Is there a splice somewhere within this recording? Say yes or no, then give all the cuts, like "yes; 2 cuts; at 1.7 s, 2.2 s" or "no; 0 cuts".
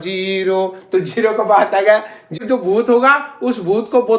yes; 1 cut; at 2.4 s